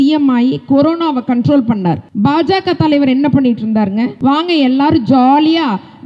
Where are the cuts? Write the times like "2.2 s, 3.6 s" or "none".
2.1 s, 4.1 s